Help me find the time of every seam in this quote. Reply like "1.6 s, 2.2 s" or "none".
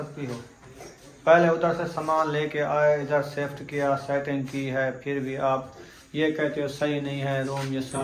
none